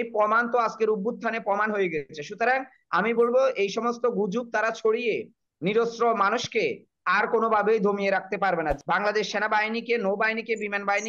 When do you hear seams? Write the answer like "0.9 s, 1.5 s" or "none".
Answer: 8.8 s